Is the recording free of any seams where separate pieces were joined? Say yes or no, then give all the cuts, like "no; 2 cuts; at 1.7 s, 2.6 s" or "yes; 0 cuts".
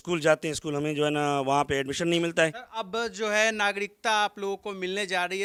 yes; 0 cuts